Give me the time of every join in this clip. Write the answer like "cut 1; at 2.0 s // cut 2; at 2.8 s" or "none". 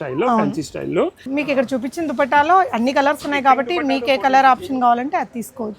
cut 1; at 1.2 s